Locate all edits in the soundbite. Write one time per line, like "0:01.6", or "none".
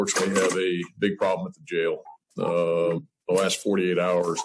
0:02.1